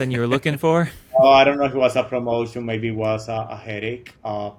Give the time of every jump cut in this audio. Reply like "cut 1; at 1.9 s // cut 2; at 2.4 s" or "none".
none